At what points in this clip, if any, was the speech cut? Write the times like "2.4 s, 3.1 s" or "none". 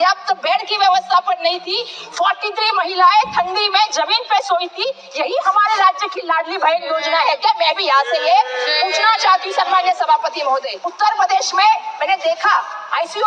10.8 s